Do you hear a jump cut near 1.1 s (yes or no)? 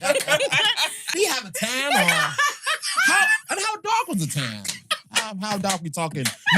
yes